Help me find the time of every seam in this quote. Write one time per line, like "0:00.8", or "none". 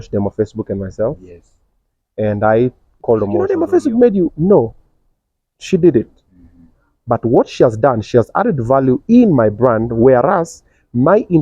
0:03.5